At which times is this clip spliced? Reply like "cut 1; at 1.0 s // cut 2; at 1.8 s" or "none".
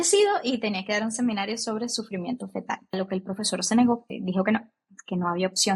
cut 1; at 2.9 s